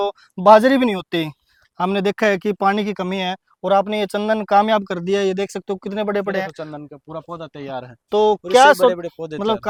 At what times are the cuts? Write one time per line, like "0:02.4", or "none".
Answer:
none